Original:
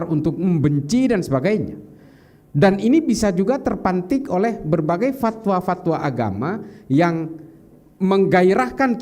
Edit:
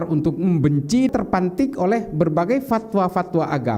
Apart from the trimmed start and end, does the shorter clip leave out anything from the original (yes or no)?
yes